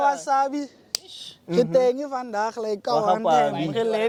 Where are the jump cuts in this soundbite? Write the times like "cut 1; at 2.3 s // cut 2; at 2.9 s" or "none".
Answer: none